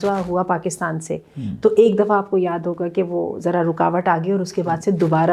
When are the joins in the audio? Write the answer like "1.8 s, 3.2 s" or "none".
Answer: none